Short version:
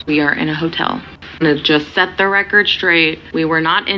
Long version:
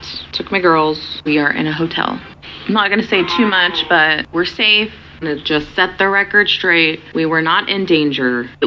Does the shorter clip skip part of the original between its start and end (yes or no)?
yes